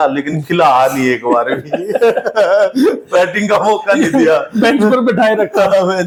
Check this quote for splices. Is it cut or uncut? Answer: uncut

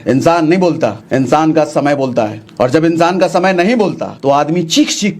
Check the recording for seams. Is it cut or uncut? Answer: cut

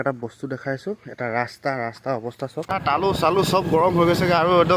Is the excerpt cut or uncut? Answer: cut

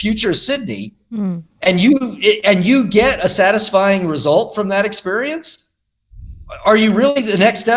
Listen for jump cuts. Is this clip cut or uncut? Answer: uncut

